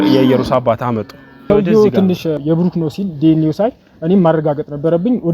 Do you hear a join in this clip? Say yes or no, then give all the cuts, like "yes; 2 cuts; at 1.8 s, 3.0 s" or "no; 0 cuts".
yes; 2 cuts; at 1.4 s, 2.4 s